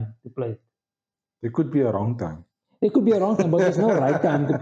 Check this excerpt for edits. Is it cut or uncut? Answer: uncut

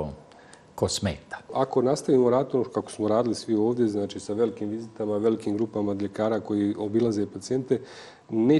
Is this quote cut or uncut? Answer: cut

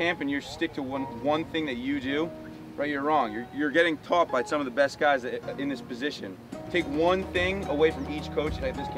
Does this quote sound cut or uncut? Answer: uncut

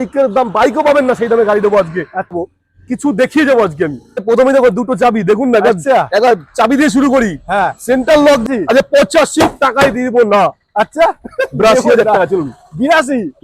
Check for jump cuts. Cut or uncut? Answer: cut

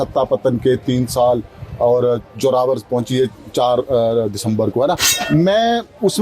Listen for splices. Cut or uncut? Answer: cut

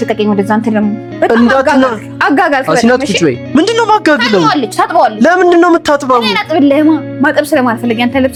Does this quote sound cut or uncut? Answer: uncut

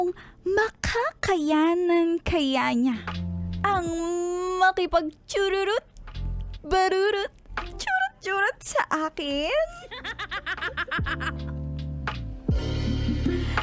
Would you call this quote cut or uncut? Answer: uncut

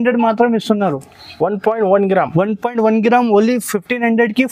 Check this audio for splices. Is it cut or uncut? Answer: uncut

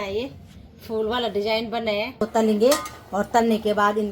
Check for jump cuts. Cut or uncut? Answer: cut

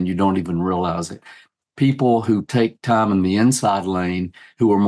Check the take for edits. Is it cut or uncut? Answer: uncut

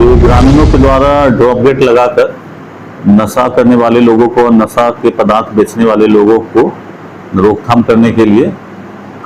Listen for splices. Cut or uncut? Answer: uncut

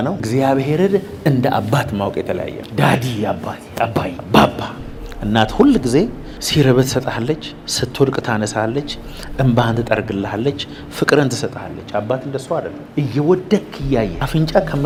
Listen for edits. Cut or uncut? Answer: uncut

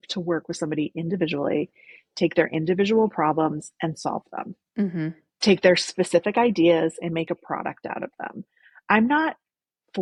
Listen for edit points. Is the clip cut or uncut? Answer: uncut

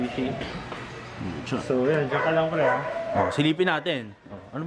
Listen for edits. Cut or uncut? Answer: uncut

